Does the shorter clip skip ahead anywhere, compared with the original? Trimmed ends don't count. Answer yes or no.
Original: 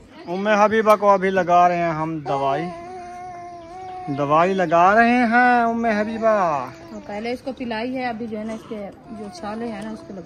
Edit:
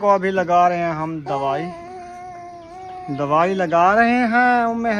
no